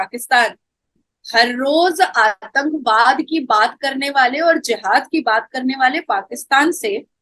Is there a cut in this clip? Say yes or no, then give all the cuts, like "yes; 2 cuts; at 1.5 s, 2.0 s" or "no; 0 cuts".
no; 0 cuts